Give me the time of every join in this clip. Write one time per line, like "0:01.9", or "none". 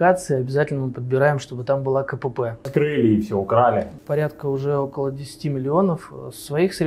0:02.7
0:04.0